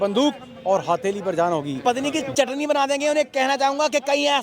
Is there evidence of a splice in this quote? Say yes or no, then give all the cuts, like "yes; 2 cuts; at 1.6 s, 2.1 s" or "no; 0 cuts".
yes; 1 cut; at 1.8 s